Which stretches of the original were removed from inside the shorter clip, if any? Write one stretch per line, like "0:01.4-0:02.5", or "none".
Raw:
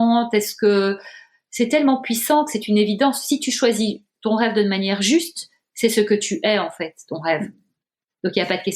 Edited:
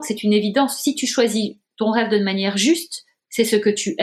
none

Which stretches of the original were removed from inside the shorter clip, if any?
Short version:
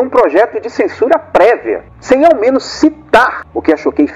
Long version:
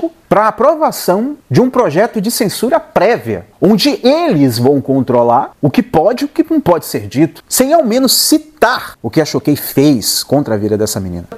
0:03.5-0:07.4

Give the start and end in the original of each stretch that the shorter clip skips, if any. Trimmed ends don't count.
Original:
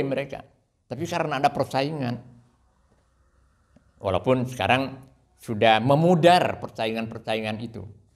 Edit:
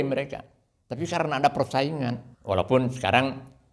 0:02.3-0:03.8

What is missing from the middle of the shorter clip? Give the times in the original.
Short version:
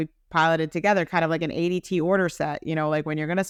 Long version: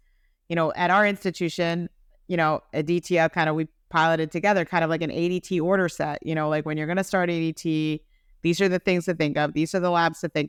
none

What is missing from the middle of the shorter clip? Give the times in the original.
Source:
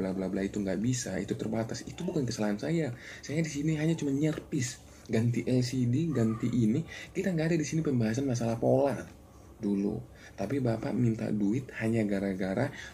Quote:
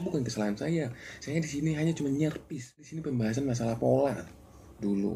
0:05.0-0:07.8

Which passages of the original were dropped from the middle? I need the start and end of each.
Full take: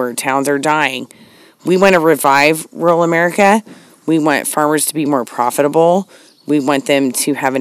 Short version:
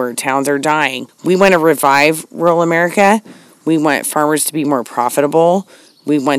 0:01.1-0:01.5

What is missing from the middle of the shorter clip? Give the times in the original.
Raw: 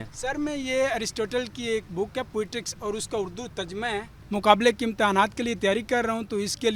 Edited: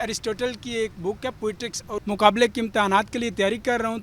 0:02.9-0:04.3

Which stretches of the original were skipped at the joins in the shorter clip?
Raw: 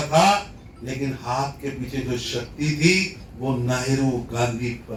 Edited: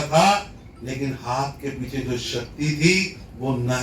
none

